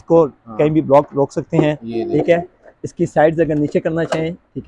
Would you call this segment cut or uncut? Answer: uncut